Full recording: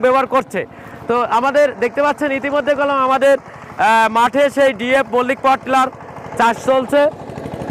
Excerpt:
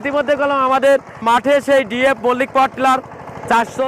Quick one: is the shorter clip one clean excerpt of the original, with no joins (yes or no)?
no